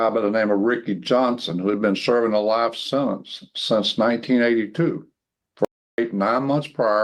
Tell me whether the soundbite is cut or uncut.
uncut